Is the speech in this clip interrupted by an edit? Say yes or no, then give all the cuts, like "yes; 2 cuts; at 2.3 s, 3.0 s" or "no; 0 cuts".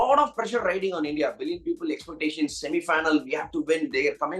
no; 0 cuts